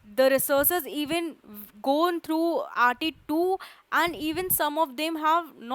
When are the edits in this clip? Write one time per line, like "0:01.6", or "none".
none